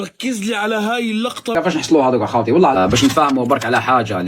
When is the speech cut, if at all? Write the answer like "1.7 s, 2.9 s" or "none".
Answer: 1.5 s